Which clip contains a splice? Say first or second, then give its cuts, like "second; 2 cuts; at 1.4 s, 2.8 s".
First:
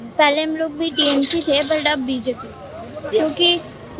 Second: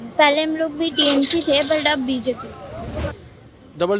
second; 1 cut; at 3.1 s